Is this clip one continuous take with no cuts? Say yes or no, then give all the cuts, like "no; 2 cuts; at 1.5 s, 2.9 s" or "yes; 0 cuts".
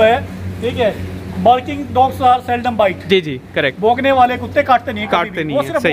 yes; 0 cuts